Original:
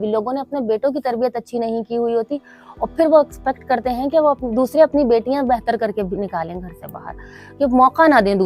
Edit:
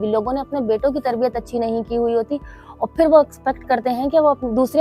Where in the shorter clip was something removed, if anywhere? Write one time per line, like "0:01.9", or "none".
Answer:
none